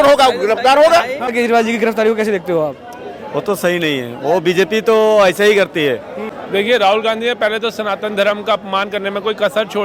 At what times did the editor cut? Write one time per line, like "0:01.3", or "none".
0:01.3
0:06.3